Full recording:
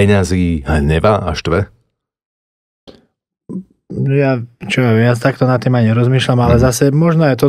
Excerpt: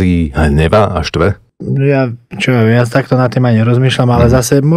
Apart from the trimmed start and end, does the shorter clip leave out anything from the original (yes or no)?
yes